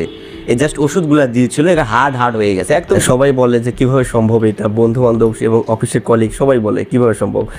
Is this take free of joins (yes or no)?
no